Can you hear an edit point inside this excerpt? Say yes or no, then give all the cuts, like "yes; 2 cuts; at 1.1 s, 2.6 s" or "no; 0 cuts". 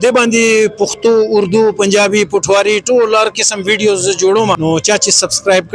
yes; 1 cut; at 4.6 s